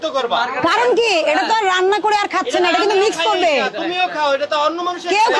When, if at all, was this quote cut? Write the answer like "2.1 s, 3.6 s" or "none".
none